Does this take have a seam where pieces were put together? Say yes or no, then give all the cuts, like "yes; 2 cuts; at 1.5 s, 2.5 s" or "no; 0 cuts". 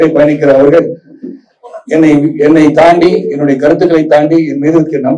no; 0 cuts